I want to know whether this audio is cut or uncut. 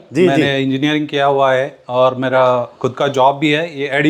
uncut